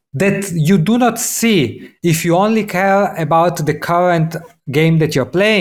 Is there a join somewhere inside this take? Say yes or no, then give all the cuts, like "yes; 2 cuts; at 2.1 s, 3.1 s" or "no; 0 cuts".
no; 0 cuts